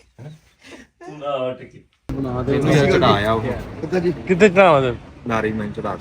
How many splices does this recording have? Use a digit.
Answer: 1